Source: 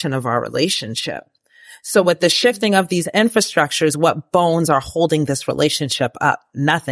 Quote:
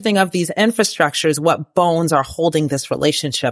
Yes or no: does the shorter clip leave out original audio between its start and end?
no